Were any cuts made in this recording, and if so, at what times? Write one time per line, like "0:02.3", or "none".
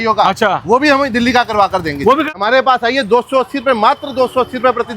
0:02.3